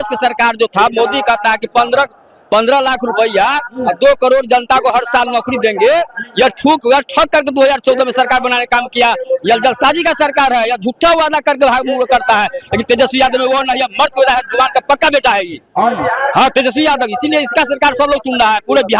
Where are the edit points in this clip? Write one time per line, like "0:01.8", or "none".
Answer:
none